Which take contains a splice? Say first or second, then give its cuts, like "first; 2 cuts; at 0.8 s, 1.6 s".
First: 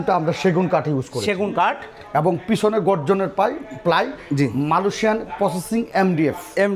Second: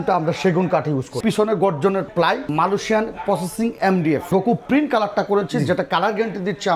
second; 3 cuts; at 1.2 s, 2.5 s, 4.2 s